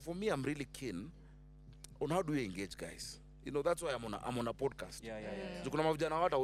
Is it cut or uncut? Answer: uncut